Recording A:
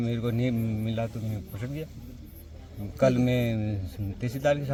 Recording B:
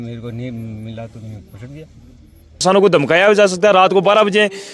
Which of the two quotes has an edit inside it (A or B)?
B